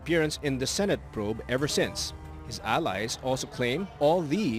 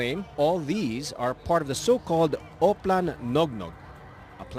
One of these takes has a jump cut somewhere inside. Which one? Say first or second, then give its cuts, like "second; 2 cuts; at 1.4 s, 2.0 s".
second; 1 cut; at 2.3 s